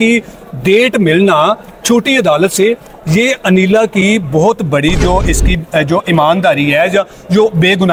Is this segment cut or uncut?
uncut